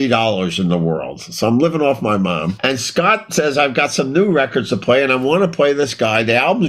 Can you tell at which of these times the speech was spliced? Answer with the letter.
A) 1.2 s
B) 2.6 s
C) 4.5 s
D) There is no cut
B